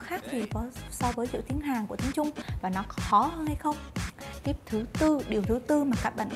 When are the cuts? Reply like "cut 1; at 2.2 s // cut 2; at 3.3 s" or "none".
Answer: cut 1; at 4.2 s